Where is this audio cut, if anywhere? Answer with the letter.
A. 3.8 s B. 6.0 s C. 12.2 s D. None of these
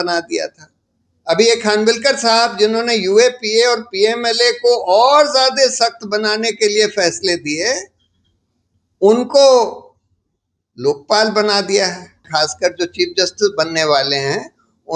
C